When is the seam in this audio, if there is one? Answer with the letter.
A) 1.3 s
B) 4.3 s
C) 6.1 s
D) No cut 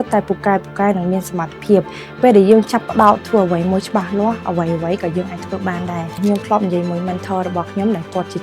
C